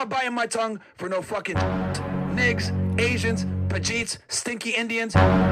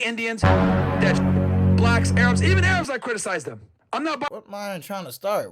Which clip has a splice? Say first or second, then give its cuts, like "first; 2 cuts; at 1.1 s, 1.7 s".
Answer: second; 1 cut; at 4.3 s